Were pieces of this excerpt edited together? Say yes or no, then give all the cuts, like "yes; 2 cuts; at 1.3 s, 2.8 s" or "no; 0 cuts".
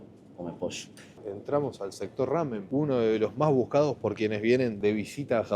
yes; 3 cuts; at 1.0 s, 2.6 s, 4.7 s